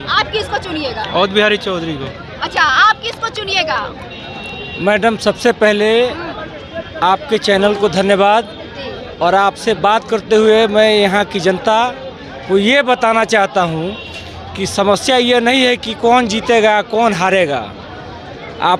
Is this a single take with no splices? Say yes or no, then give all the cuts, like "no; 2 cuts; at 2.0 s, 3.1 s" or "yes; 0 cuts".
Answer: yes; 0 cuts